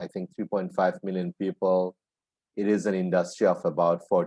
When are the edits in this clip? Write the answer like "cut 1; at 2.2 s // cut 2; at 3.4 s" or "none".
none